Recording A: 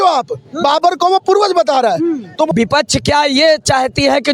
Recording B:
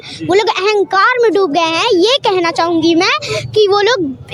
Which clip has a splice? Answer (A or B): A